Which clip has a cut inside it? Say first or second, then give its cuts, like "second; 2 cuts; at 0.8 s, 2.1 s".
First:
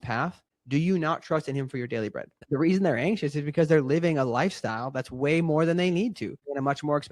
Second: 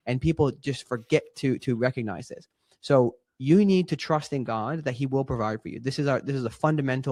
first; 1 cut; at 2.4 s